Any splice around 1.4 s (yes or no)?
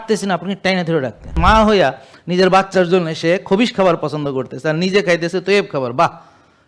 yes